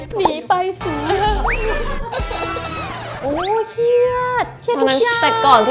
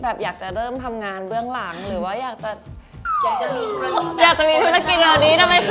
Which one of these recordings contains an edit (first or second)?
first